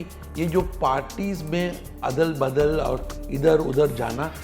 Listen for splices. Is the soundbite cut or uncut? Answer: uncut